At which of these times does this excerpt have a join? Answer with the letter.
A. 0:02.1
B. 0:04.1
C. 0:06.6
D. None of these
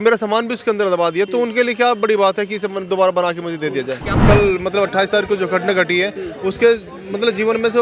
B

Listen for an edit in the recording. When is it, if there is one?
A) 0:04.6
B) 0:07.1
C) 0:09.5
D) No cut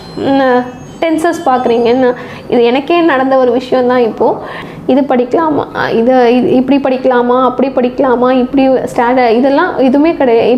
A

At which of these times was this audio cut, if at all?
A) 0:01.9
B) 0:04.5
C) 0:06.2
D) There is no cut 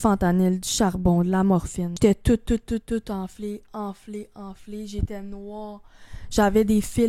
A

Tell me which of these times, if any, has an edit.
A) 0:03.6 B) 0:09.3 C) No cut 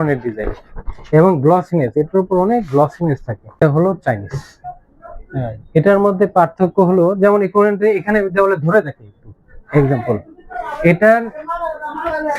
A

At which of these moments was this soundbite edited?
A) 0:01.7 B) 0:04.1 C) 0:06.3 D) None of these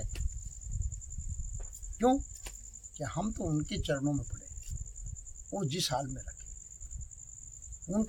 D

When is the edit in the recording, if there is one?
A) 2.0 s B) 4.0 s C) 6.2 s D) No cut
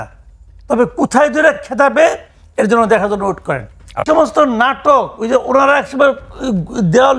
B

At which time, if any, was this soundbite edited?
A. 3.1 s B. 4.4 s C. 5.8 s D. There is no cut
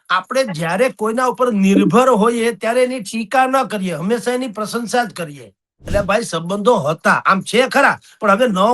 C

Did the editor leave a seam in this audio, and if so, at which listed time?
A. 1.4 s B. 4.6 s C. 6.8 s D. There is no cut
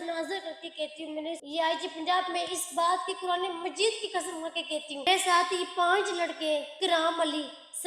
A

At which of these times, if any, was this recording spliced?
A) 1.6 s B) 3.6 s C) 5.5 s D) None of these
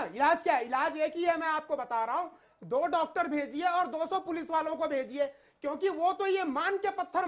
D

